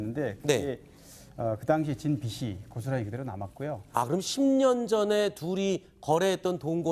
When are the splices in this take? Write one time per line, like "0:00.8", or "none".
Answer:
0:05.0